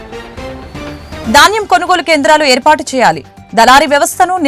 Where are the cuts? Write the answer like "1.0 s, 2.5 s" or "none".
1.2 s